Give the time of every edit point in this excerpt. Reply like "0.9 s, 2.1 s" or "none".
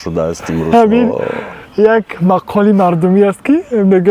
none